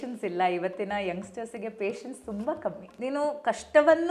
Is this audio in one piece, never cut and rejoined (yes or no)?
no